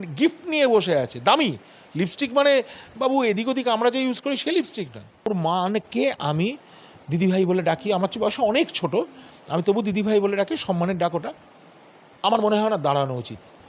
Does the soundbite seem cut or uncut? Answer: cut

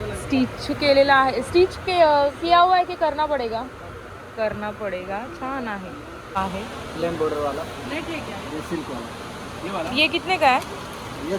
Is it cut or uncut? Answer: cut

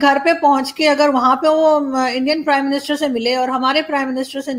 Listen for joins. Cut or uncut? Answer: uncut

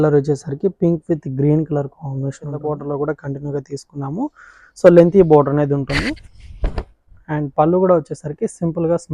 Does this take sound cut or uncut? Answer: cut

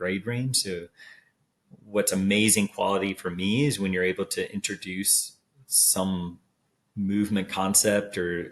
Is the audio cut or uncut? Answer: uncut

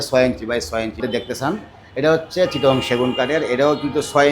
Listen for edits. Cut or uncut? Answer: cut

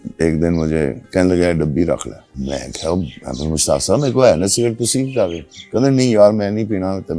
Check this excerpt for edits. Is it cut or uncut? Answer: cut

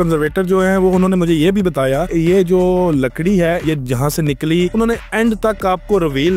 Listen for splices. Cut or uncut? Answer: uncut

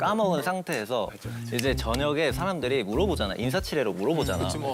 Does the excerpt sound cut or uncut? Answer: uncut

